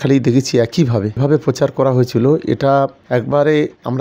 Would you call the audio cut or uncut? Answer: cut